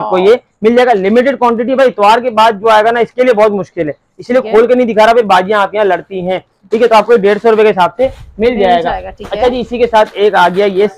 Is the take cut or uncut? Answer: uncut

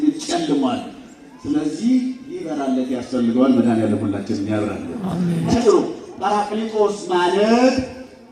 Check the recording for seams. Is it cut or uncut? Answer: cut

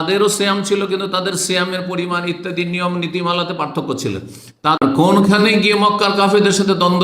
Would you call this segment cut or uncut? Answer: cut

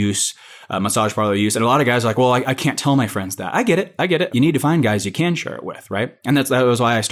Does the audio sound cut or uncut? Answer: cut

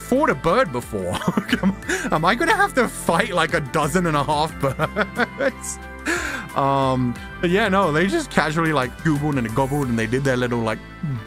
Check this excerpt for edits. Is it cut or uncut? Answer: uncut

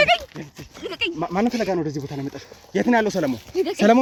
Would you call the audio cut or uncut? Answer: uncut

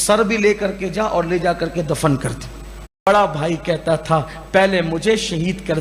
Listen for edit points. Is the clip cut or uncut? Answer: cut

